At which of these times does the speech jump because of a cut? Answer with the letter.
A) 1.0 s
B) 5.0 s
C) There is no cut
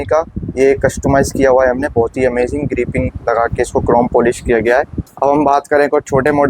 B